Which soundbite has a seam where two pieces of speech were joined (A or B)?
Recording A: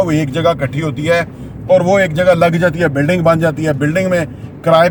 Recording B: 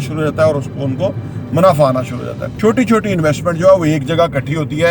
B